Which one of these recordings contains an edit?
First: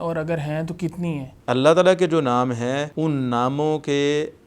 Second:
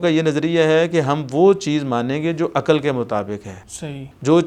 first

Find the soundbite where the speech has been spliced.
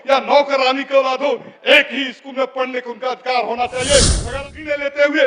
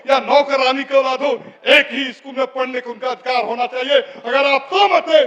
first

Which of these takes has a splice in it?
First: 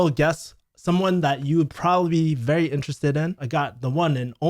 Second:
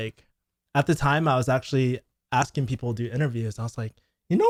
first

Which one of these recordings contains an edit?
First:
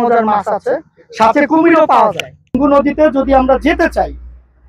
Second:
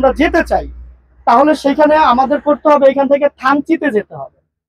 first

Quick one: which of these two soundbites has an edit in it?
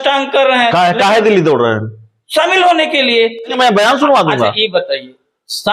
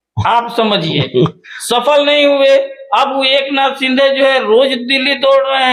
first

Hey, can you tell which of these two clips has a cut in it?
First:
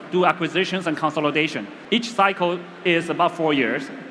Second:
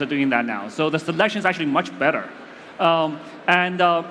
first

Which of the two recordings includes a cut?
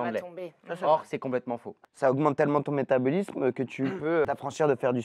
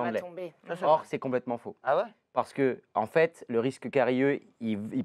first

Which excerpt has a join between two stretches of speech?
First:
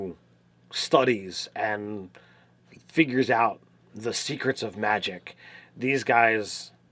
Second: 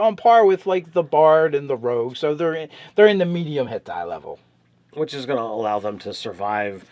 first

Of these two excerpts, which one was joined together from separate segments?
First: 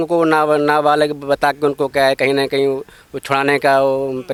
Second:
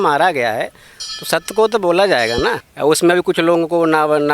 second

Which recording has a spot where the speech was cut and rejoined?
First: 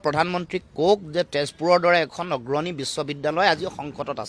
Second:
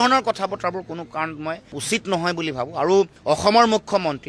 second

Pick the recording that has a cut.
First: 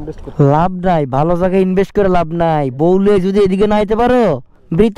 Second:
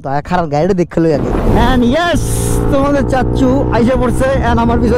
second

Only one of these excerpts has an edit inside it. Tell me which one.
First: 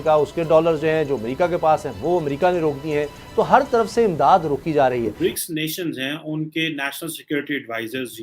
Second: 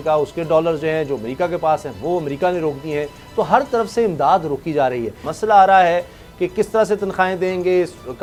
first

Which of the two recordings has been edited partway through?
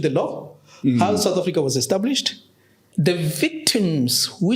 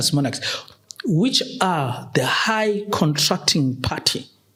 first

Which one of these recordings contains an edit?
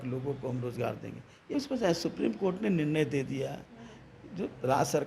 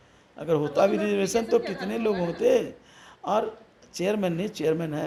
first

